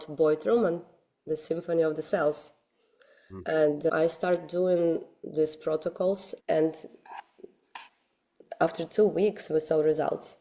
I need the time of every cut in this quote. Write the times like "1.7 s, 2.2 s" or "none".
3.9 s, 6.3 s